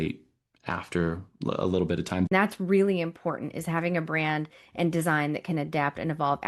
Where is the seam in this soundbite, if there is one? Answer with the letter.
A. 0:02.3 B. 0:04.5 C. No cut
A